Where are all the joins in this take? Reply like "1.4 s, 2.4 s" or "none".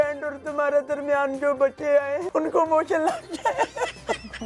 2.3 s

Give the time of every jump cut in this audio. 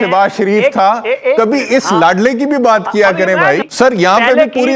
3.6 s

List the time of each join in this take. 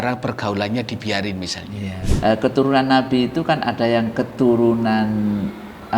2.1 s

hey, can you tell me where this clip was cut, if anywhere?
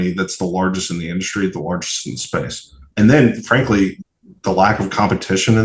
2.9 s, 4.0 s

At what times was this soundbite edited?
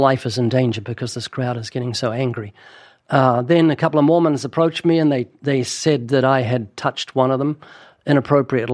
none

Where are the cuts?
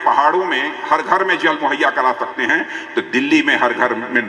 none

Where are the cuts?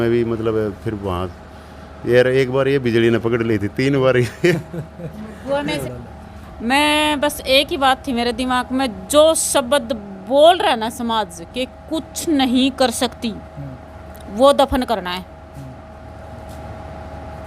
5.8 s

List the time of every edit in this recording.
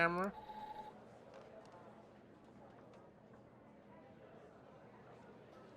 none

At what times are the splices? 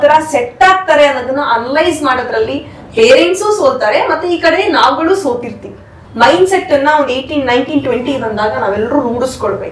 6.0 s

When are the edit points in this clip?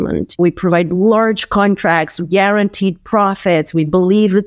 none

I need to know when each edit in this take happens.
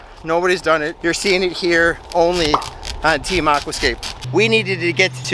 4.2 s

